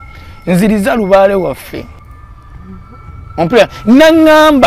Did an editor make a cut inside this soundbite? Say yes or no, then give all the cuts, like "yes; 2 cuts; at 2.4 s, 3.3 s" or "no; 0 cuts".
yes; 1 cut; at 2.0 s